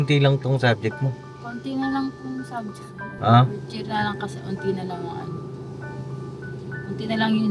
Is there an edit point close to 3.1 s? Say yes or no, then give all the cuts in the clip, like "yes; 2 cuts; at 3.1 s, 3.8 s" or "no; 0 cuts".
yes; 1 cut; at 3.1 s